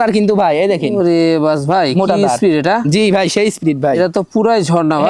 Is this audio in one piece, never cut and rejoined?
yes; 0 cuts

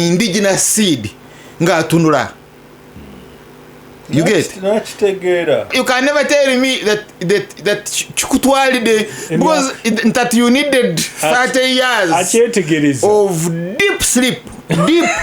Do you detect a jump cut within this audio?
yes; 1 cut; at 5.7 s

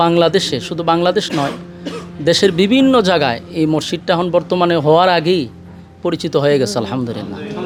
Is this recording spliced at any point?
no; 0 cuts

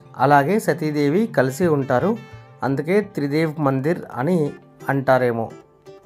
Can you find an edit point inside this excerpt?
no; 0 cuts

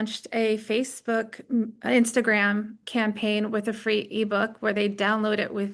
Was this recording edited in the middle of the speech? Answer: yes; 1 cut; at 2.8 s

